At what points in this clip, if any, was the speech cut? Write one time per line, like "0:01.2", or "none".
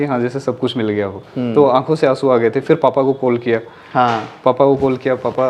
0:01.2